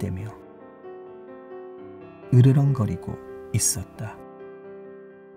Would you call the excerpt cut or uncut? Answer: uncut